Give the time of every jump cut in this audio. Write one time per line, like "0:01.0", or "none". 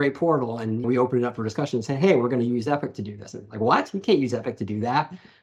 none